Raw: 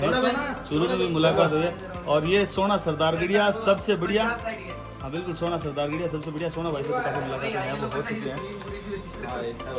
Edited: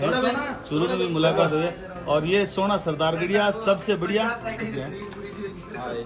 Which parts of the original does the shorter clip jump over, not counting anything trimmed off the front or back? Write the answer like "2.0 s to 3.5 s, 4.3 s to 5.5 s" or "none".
4.6 s to 8.1 s